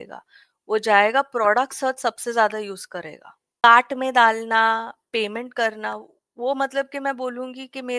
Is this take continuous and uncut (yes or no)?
no